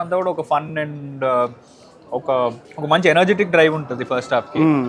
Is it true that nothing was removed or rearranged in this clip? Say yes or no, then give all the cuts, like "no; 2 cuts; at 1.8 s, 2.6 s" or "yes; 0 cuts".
no; 1 cut; at 2.7 s